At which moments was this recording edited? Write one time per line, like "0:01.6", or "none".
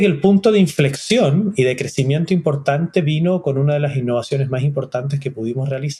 none